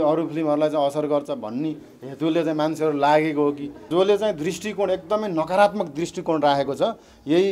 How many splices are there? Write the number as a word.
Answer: one